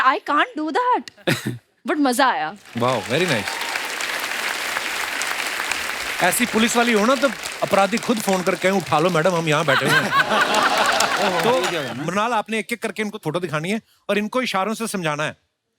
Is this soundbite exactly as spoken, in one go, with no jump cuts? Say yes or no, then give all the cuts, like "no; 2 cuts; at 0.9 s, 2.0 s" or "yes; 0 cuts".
no; 1 cut; at 11.4 s